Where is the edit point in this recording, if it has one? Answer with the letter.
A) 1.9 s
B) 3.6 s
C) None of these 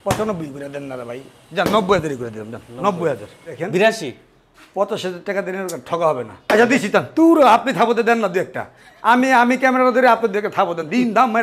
B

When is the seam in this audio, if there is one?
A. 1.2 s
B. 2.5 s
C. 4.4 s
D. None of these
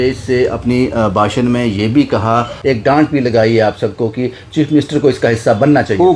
B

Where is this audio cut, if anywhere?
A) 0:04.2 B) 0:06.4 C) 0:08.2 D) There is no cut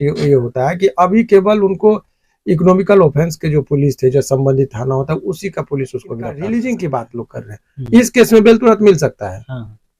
B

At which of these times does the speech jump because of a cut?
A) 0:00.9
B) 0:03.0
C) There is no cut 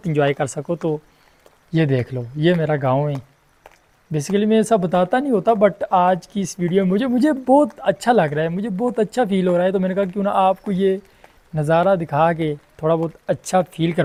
C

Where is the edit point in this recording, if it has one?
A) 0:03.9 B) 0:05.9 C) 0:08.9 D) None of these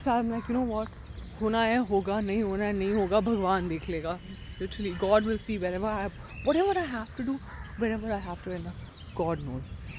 D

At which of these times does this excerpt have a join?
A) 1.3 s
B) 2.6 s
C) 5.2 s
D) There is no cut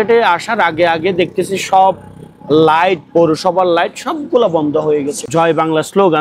C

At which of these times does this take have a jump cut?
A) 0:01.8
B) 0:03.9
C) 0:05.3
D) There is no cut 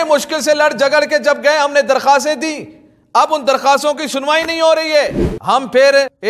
C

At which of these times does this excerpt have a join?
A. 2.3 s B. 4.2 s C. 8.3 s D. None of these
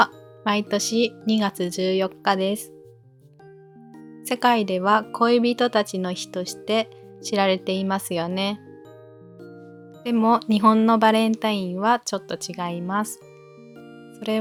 D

